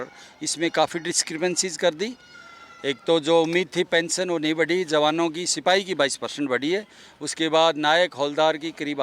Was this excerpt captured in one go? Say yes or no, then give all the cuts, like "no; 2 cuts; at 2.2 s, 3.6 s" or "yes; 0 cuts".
yes; 0 cuts